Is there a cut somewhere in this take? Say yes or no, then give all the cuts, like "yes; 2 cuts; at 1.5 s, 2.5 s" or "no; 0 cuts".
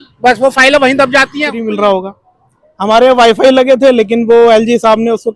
yes; 1 cut; at 1.6 s